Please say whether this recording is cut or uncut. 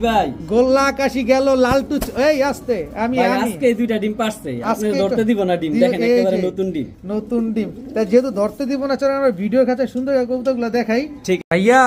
uncut